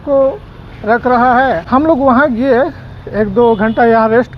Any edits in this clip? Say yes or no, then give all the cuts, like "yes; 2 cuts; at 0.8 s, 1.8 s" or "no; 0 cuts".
yes; 1 cut; at 1.6 s